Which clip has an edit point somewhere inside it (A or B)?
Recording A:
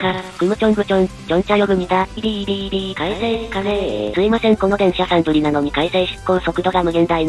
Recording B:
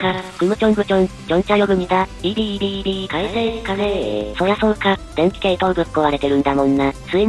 A